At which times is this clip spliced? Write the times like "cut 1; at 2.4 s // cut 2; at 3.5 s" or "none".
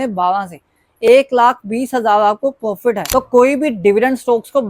cut 1; at 3.1 s

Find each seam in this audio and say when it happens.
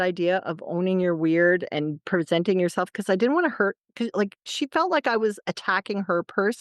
cut 1; at 2.0 s // cut 2; at 4.5 s

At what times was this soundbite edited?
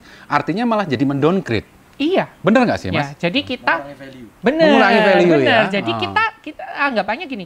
none

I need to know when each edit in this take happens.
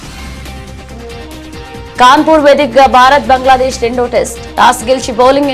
none

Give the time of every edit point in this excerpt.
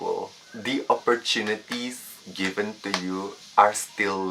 cut 1; at 3.4 s

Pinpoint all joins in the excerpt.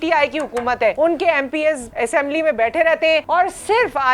cut 1; at 0.9 s // cut 2; at 1.9 s // cut 3; at 3.2 s

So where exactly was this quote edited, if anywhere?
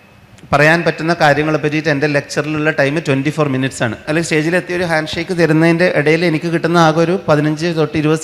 cut 1; at 4.0 s

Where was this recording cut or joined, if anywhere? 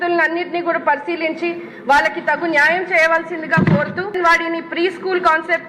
cut 1; at 4.2 s

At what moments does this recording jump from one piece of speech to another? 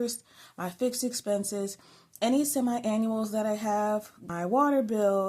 cut 1; at 4.2 s

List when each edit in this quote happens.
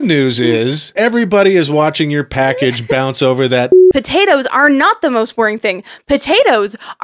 cut 1; at 0.9 s // cut 2; at 3.8 s

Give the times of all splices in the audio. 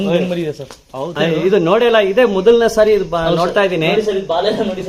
cut 1; at 1.1 s

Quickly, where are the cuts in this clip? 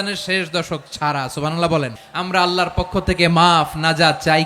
cut 1; at 2.1 s

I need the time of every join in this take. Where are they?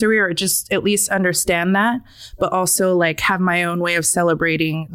none

